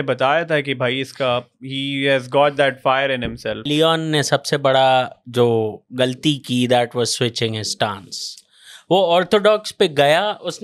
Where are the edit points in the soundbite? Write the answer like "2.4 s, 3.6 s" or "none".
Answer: 3.6 s

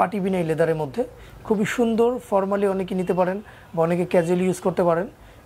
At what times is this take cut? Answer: none

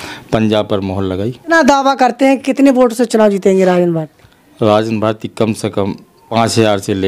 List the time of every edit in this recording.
1.5 s, 6.3 s

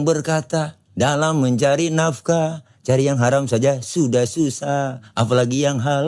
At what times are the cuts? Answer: none

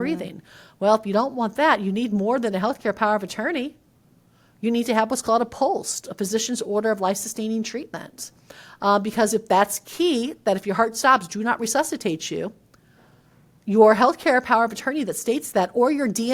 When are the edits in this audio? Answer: none

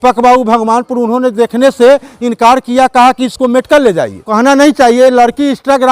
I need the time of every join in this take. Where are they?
4.3 s

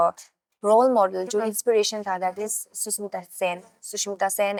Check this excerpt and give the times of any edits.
none

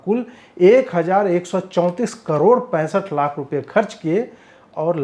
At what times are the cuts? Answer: none

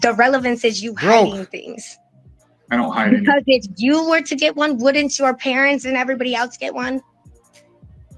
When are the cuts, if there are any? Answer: none

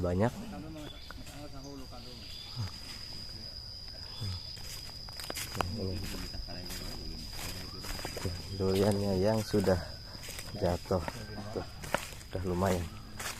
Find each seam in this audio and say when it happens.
4.6 s

